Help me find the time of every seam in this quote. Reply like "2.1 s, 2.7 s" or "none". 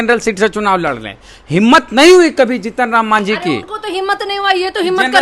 none

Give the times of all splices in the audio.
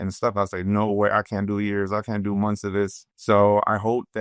3.1 s

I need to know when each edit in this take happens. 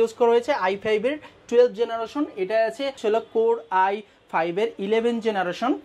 3.0 s

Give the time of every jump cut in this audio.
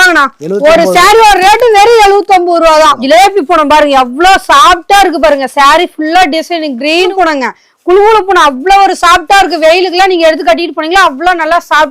3.0 s, 7.1 s

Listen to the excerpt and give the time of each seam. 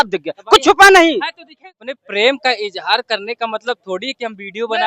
1.9 s

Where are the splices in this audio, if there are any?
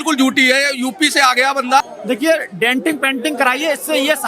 1.8 s

